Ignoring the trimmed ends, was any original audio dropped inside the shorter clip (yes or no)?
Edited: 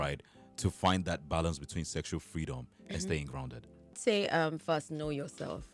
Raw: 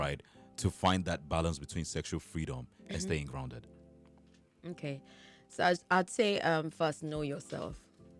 yes